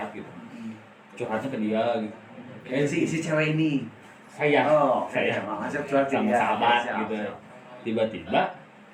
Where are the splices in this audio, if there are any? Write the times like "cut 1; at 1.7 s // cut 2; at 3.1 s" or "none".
none

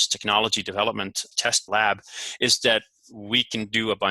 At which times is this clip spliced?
cut 1; at 1.6 s

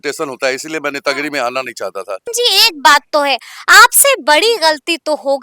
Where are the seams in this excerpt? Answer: cut 1; at 2.3 s

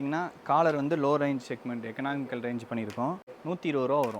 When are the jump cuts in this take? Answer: cut 1; at 3.3 s

